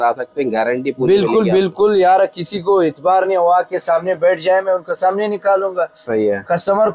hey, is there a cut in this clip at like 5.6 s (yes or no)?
no